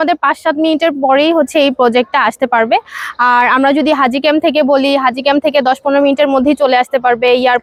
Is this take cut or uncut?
uncut